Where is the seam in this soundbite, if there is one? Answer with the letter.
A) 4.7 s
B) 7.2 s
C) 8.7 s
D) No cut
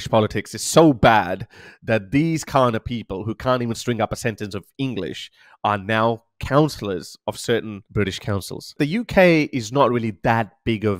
C